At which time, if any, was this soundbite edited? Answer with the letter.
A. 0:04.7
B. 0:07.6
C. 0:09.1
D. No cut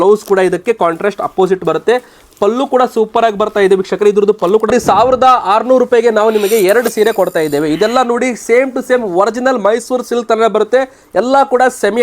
A